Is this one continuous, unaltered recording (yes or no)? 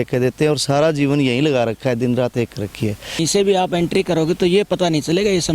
no